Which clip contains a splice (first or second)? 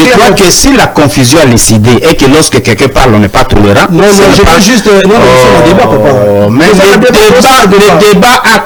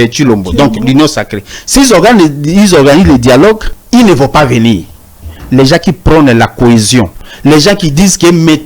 second